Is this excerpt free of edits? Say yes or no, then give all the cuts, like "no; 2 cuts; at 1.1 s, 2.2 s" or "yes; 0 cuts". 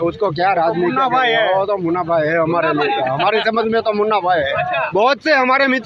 no; 1 cut; at 4.9 s